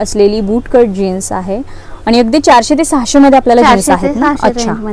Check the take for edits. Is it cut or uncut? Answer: uncut